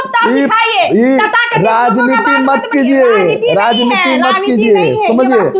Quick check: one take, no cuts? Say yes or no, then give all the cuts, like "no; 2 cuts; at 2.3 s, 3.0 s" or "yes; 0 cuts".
yes; 0 cuts